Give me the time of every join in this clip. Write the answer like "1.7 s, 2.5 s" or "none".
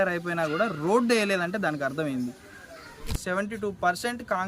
3.1 s